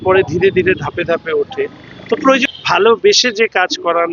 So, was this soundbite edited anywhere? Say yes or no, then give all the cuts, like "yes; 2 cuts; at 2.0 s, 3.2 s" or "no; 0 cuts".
yes; 1 cut; at 2.4 s